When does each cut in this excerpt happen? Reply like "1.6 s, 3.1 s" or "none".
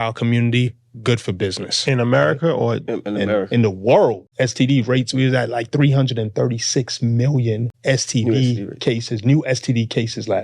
4.2 s, 7.7 s